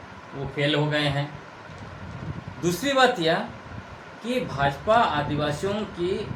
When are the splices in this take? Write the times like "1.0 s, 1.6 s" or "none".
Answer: none